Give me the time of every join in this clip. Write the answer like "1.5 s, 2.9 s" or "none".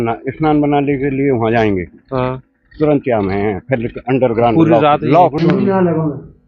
5.4 s

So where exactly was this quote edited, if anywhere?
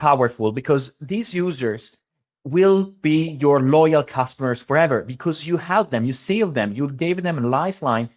none

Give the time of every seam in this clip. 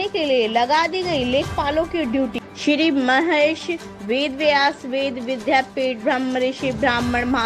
2.4 s

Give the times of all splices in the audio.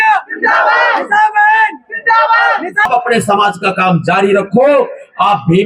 2.8 s

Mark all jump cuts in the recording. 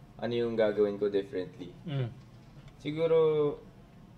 none

